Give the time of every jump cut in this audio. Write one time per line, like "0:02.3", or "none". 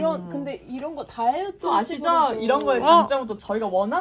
none